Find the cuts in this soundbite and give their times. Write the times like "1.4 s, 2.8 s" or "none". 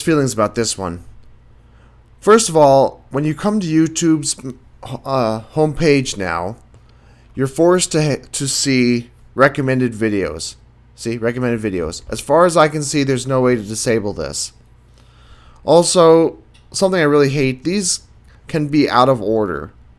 16.6 s